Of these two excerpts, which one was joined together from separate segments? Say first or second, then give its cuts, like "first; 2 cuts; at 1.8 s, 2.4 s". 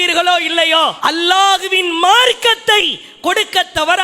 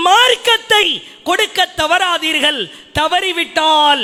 first; 1 cut; at 1.0 s